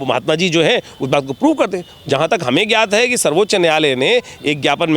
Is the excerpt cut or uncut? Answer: uncut